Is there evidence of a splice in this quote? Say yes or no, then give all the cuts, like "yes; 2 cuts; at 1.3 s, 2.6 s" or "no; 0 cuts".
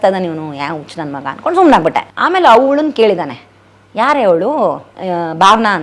yes; 2 cuts; at 2.1 s, 4.9 s